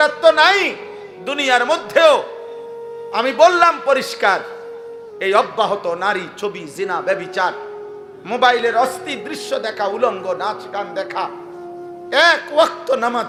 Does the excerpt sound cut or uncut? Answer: uncut